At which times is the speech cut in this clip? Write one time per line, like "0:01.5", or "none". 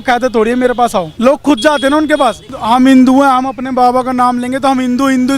0:01.1
0:02.5